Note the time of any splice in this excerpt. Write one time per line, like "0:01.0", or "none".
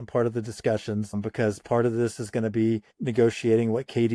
0:01.2
0:03.0